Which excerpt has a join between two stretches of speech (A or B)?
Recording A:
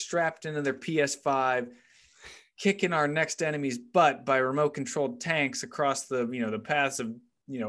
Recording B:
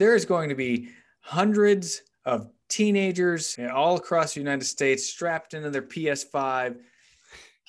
B